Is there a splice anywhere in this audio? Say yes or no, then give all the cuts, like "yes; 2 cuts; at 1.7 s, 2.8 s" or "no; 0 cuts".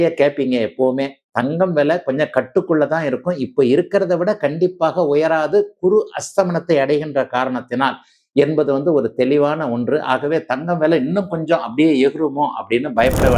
no; 0 cuts